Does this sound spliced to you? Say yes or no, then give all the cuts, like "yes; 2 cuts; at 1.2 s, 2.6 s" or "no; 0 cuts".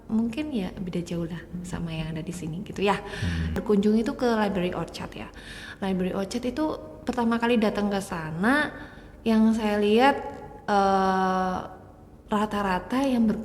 yes; 1 cut; at 3.6 s